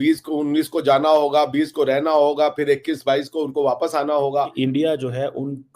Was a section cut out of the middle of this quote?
yes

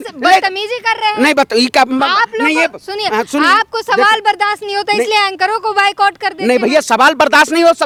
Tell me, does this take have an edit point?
no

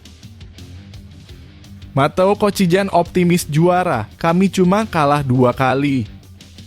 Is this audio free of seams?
no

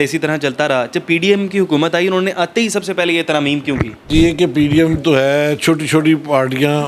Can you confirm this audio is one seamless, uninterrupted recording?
no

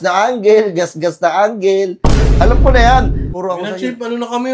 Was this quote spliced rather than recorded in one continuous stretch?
yes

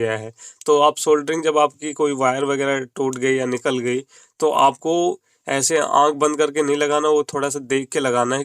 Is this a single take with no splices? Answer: yes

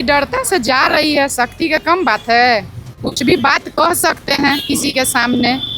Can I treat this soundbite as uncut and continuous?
yes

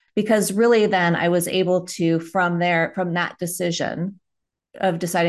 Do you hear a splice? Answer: no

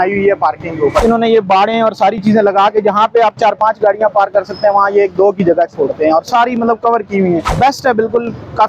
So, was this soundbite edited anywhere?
yes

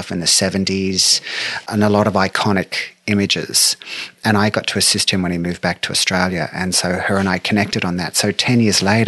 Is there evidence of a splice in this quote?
yes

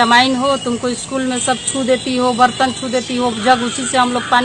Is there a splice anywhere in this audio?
no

